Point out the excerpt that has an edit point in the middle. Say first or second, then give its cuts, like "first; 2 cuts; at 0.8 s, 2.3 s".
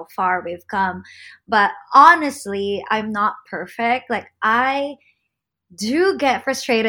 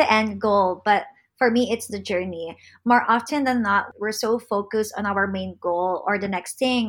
second; 1 cut; at 3.9 s